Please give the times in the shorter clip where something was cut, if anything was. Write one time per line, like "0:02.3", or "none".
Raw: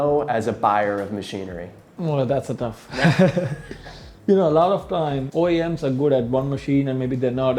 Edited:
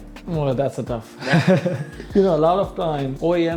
0:01.9